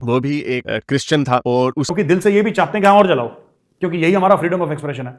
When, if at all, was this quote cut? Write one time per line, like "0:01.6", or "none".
0:01.8